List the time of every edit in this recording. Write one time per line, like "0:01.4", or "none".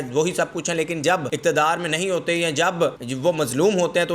0:01.3
0:03.1